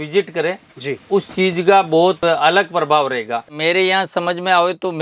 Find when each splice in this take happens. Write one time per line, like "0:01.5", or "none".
0:02.2
0:03.6